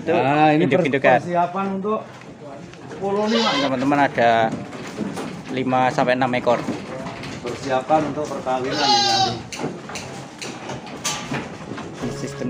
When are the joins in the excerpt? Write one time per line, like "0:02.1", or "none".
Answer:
0:03.6

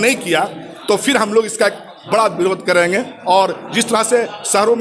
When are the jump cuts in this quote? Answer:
none

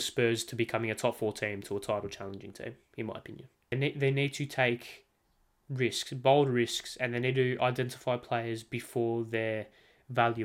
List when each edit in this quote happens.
0:03.7

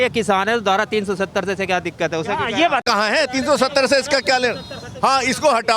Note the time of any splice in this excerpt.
none

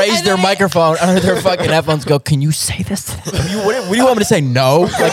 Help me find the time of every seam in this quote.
0:03.5

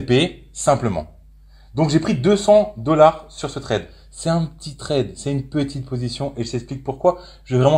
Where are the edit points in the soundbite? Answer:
none

